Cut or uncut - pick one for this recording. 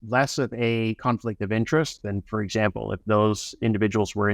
uncut